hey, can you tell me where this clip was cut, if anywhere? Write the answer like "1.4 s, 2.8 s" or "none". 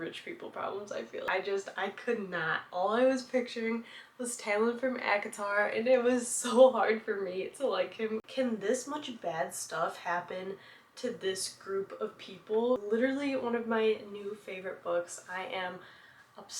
1.3 s, 8.3 s, 12.8 s